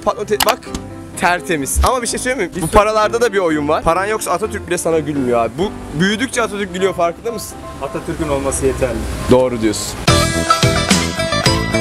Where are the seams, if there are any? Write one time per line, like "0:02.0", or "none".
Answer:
none

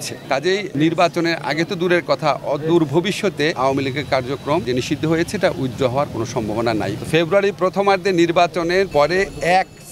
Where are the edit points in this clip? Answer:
0:00.7
0:03.5
0:04.7
0:06.9

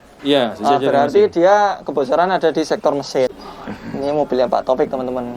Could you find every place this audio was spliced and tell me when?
0:03.3

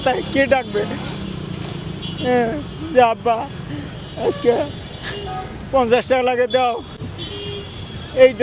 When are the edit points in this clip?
none

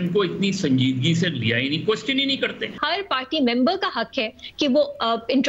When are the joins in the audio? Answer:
0:02.8

